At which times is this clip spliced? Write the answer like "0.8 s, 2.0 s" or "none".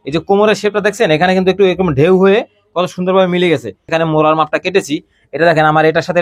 3.9 s